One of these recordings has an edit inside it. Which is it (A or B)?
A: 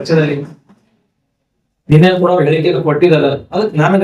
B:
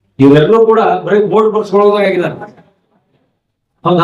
A